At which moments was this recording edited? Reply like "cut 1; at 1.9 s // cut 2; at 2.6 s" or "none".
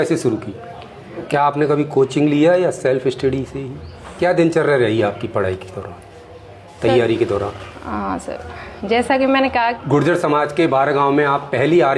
cut 1; at 1.2 s // cut 2; at 4.1 s // cut 3; at 9.8 s